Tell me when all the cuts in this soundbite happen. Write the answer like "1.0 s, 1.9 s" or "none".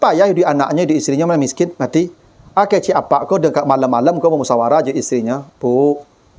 none